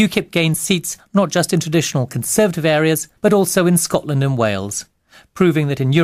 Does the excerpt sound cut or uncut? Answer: cut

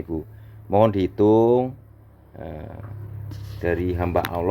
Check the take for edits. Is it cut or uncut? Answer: uncut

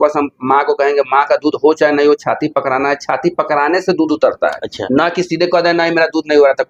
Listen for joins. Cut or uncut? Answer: uncut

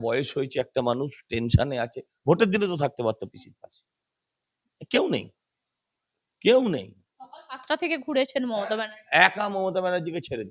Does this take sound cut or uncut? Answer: uncut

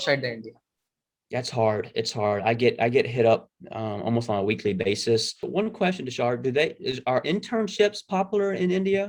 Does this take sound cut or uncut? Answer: cut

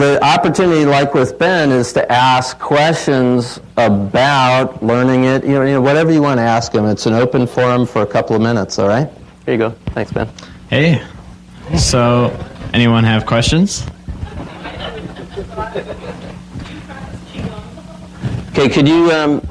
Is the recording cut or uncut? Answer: cut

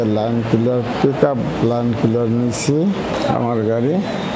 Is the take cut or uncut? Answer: uncut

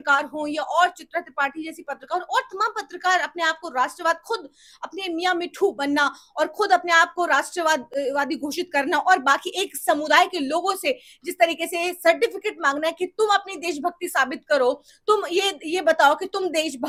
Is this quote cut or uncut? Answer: uncut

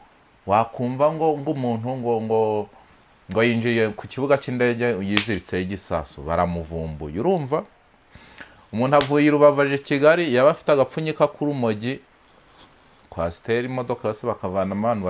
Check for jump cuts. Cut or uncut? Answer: uncut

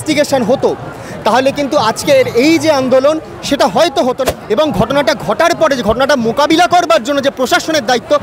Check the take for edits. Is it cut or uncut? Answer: cut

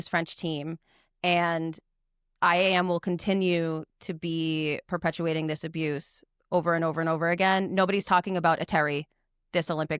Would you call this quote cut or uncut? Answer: uncut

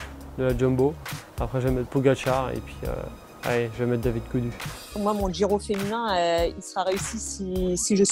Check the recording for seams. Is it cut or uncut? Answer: cut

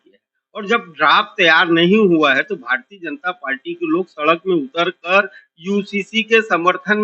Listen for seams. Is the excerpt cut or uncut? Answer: uncut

